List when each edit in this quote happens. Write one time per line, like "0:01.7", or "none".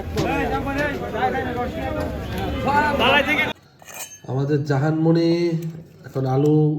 0:03.5